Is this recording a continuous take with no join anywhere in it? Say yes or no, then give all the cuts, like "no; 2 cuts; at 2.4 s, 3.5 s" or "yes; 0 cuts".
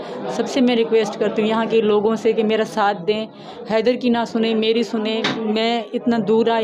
yes; 0 cuts